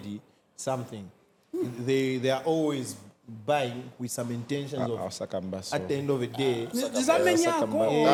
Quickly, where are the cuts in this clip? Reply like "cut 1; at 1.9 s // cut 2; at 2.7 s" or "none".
none